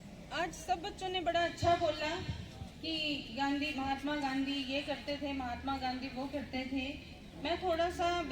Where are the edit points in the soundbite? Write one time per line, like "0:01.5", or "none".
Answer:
none